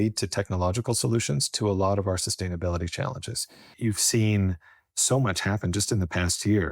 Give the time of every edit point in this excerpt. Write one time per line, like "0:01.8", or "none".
0:03.7